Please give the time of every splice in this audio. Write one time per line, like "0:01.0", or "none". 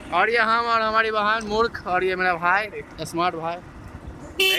0:02.0